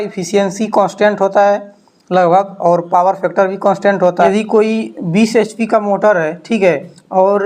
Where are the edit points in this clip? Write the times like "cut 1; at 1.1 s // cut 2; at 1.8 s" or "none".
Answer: cut 1; at 4.1 s